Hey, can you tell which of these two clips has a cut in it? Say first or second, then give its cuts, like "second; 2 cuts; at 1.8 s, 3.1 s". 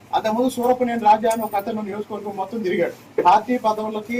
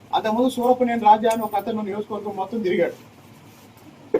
first; 1 cut; at 3.0 s